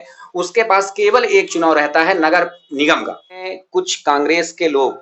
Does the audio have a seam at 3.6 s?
yes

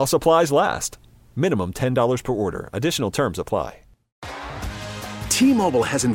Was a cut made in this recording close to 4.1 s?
yes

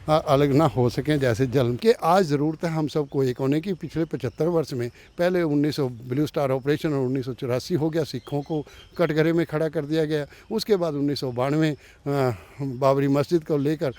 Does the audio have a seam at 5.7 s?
no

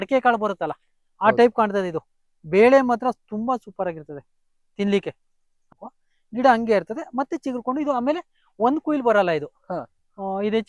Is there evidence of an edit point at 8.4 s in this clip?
no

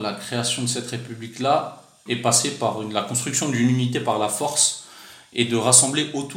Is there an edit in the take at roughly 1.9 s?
yes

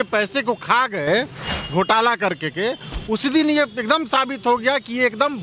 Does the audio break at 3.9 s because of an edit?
no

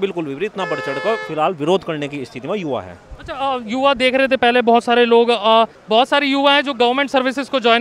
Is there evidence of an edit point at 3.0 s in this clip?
no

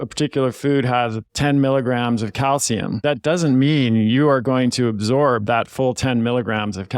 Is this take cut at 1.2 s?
yes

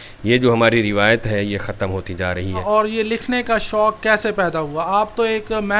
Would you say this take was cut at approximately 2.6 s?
yes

